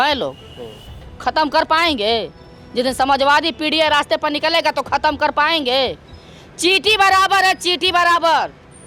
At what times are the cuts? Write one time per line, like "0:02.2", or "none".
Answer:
none